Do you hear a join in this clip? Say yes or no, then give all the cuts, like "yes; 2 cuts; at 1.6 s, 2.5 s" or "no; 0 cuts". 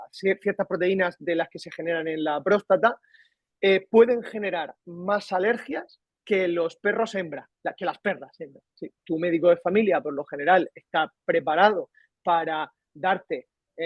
yes; 1 cut; at 8.9 s